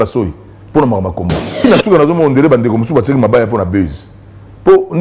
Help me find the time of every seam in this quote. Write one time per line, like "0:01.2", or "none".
0:01.6

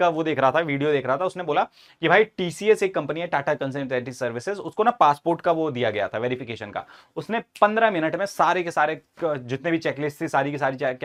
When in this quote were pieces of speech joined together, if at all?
none

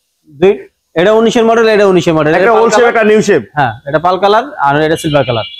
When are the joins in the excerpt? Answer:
none

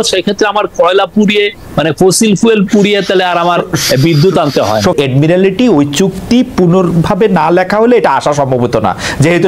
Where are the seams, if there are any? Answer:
0:04.9

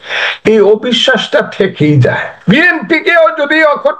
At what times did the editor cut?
0:02.3

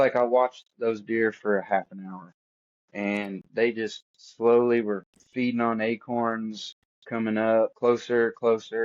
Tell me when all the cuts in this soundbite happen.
0:07.7

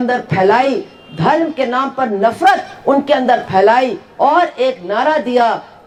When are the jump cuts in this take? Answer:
none

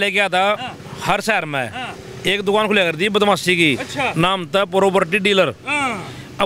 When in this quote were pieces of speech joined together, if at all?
none

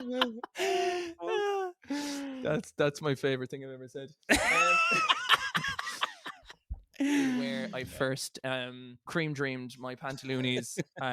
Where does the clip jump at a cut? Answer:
0:07.7

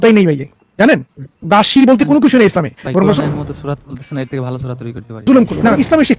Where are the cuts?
0:03.2
0:05.3

